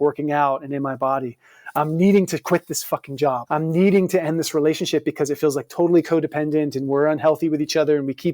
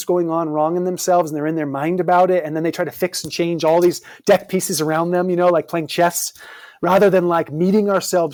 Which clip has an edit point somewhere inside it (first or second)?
first